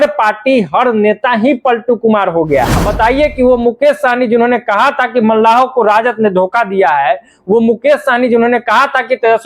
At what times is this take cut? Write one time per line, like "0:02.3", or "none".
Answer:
0:02.8